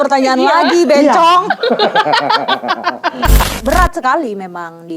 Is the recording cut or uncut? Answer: cut